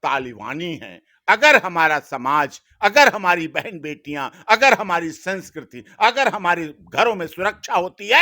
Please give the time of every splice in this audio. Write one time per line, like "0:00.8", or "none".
none